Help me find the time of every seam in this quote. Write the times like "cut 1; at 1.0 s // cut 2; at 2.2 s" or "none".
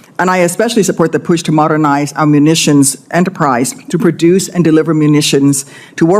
none